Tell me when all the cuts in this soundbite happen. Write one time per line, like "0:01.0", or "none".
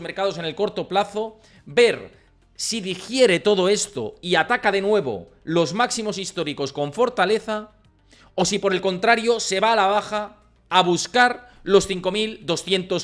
none